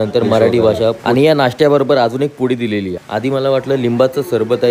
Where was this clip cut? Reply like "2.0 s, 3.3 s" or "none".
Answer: 1.0 s